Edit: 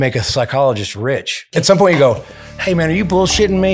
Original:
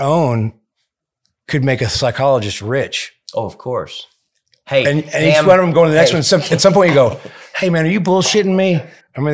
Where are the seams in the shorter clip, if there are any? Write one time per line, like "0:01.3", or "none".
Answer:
0:01.5